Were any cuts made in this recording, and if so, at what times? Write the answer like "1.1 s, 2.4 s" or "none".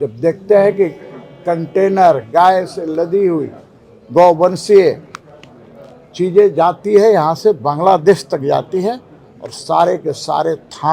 none